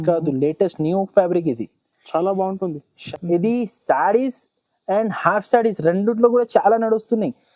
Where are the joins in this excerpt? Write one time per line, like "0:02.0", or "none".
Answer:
0:03.1

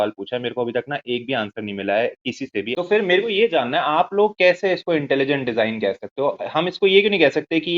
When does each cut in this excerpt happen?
0:02.7

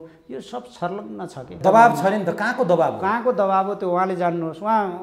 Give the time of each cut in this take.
0:01.6

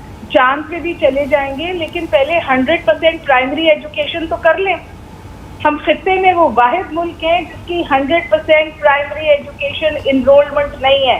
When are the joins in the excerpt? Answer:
none

